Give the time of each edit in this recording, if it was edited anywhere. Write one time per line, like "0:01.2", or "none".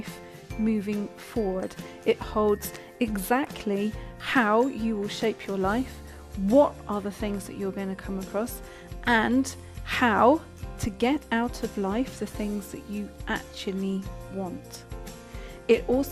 0:06.8